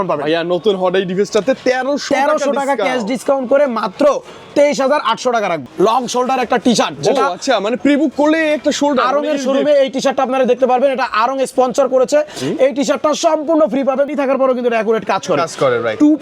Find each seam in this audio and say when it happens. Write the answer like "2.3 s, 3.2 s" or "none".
5.7 s, 14.1 s